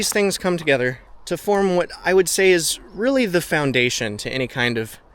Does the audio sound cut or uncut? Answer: cut